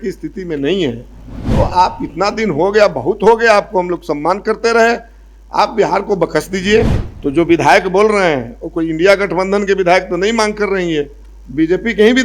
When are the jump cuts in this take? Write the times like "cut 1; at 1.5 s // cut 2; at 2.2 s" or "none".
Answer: cut 1; at 7.0 s